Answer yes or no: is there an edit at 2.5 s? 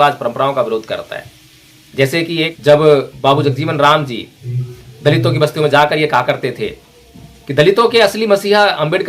yes